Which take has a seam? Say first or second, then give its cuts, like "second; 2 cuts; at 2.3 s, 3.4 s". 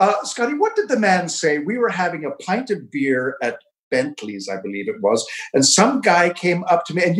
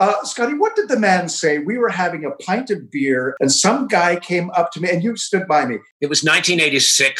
second; 2 cuts; at 3.3 s, 5.8 s